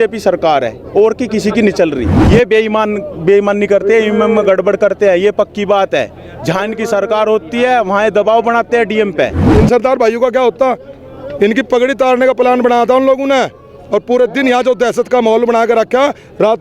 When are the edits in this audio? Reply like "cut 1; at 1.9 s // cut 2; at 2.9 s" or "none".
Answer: cut 1; at 2.1 s // cut 2; at 9.4 s